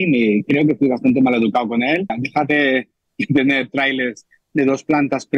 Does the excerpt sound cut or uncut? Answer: cut